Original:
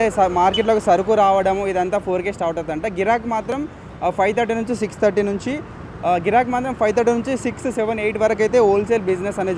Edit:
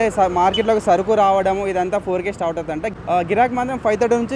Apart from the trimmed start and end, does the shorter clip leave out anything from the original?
yes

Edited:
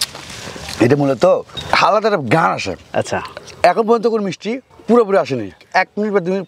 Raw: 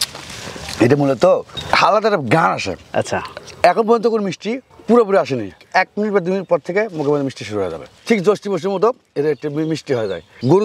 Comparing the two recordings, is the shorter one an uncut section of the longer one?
yes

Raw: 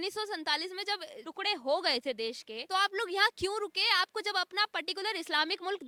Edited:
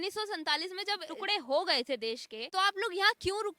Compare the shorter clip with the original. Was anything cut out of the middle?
yes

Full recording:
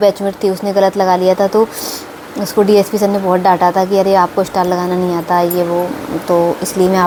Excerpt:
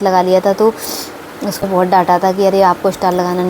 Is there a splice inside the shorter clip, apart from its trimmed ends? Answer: yes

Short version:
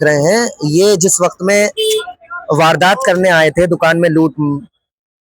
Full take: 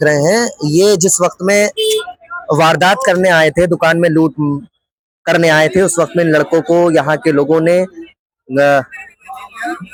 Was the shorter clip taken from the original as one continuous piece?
yes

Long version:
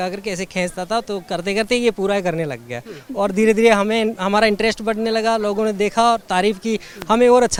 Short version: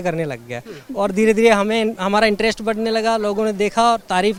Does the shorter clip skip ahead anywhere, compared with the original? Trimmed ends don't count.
no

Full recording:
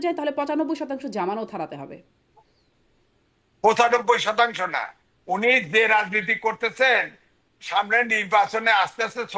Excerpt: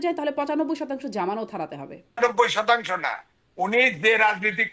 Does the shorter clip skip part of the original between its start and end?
yes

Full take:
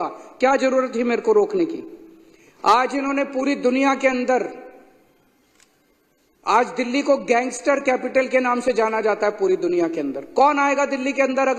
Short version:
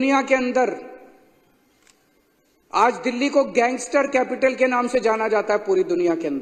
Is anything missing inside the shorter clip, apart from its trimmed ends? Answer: no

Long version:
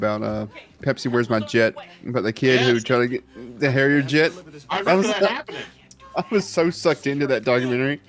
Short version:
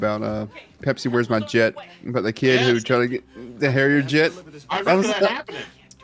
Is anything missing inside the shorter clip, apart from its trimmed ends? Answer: no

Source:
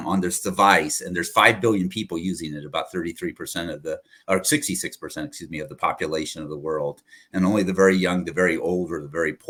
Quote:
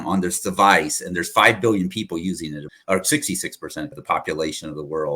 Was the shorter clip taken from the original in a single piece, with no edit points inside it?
no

